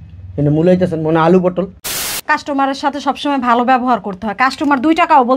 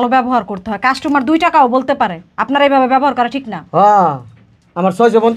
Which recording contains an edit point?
first; 1 cut; at 2.1 s

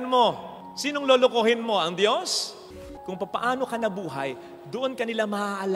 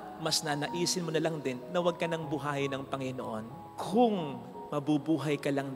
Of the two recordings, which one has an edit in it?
first; 1 cut; at 2.8 s

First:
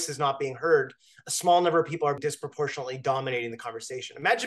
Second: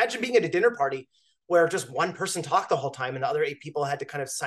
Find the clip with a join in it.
first; 1 cut; at 2.2 s

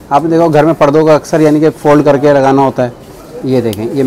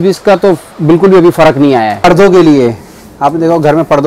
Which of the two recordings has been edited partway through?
second; 1 cut; at 1.9 s

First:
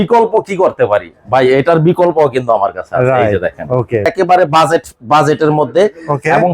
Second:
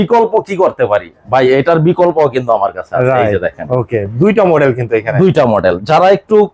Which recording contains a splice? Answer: first; 1 cut; at 4.1 s

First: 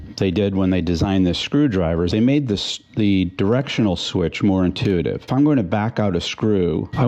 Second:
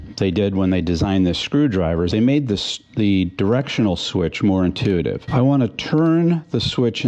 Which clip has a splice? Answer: second; 1 cut; at 5.2 s

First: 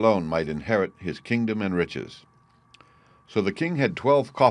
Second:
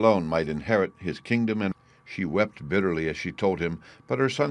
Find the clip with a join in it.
first; 1 cut; at 1.7 s

